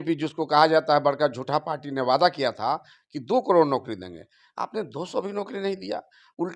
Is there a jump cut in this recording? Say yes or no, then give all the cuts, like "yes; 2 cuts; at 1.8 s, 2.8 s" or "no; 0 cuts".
no; 0 cuts